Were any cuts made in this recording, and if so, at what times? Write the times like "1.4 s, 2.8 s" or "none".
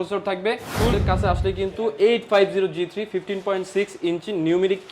0.9 s